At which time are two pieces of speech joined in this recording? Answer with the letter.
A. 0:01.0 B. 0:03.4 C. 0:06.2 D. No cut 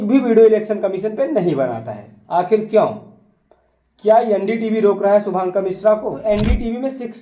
C